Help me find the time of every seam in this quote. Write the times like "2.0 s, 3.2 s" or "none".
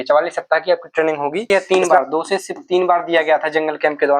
1.5 s